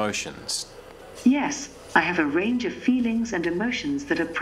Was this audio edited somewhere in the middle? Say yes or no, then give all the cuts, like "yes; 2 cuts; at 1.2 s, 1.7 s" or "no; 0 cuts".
no; 0 cuts